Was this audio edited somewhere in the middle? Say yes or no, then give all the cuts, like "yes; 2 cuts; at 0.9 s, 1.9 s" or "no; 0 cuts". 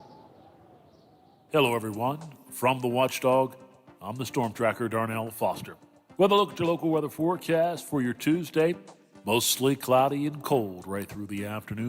yes; 1 cut; at 1.5 s